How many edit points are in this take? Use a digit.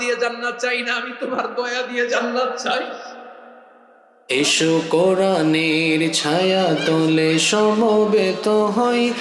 1